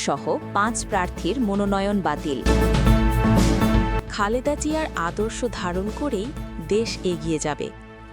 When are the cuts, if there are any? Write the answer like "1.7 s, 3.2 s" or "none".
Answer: 2.4 s, 4.1 s